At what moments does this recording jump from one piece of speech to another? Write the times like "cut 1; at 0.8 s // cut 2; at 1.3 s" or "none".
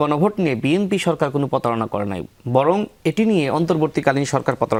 none